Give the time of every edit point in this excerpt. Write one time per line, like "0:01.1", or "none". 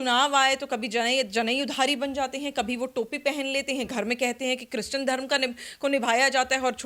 none